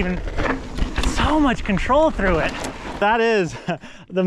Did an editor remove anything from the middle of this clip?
yes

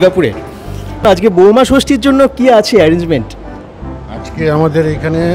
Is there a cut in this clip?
yes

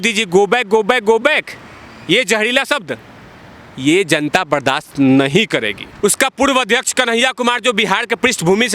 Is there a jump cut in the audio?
yes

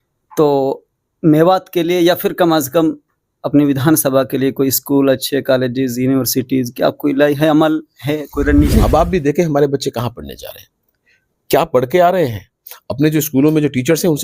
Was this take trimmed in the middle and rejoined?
yes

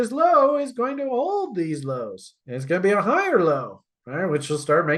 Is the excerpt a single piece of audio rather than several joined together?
yes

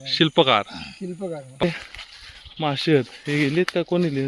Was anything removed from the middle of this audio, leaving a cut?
yes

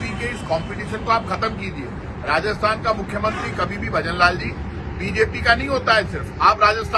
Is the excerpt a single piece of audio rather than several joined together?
yes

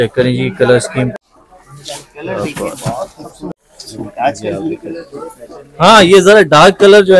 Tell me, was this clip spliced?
yes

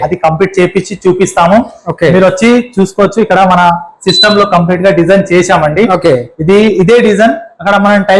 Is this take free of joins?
yes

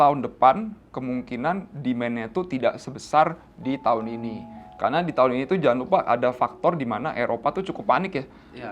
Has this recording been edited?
no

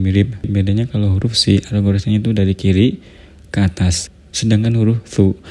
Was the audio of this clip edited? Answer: yes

